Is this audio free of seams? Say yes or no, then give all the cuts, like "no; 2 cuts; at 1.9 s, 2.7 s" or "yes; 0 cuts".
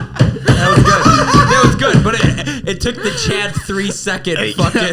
yes; 0 cuts